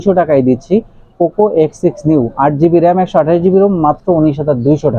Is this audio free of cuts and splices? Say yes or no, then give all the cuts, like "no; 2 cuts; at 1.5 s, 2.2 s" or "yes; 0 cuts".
yes; 0 cuts